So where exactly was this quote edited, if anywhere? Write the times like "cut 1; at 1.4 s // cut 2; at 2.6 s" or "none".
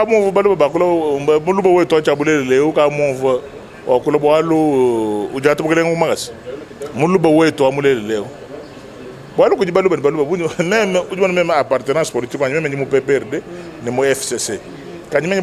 none